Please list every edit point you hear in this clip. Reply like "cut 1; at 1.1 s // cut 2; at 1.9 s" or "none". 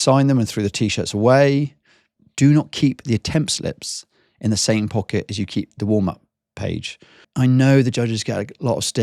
cut 1; at 2.3 s // cut 2; at 7.2 s

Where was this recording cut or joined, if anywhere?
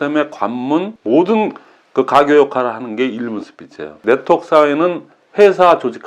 cut 1; at 0.9 s // cut 2; at 3.9 s

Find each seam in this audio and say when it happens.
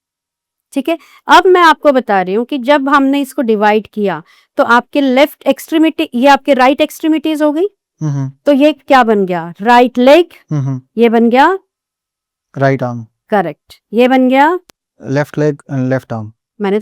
none

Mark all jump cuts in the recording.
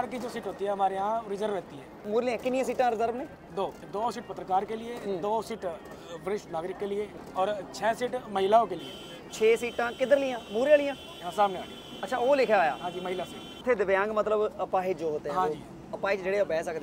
cut 1; at 2.1 s // cut 2; at 3.8 s // cut 3; at 7.1 s // cut 4; at 13.6 s

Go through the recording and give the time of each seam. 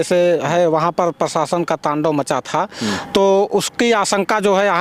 none

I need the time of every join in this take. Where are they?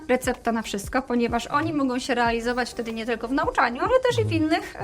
none

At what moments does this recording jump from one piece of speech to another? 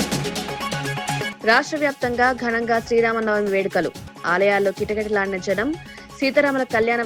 cut 1; at 1.3 s

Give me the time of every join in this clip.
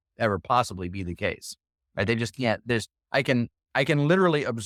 none

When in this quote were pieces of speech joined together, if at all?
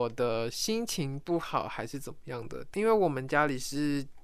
cut 1; at 2.7 s

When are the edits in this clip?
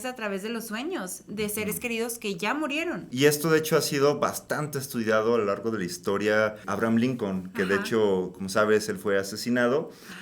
cut 1; at 3.1 s // cut 2; at 6.7 s

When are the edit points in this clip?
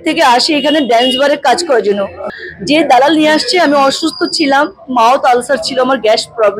cut 1; at 2.2 s

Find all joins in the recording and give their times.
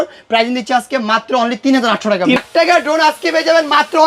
cut 1; at 2.4 s

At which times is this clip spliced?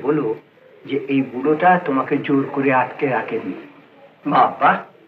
none

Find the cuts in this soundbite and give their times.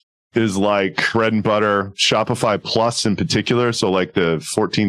cut 1; at 1.0 s

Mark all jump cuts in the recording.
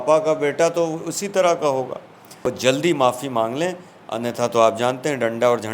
cut 1; at 2.5 s

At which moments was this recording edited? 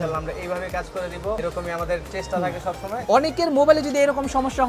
cut 1; at 1.4 s // cut 2; at 3.0 s

